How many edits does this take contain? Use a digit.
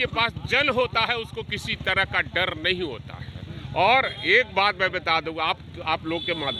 0